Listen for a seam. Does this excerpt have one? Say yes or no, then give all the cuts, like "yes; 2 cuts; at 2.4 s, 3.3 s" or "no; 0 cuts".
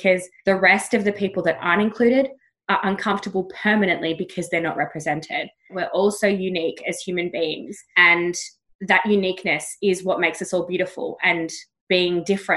yes; 1 cut; at 5.8 s